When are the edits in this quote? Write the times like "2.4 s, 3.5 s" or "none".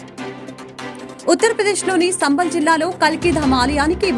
none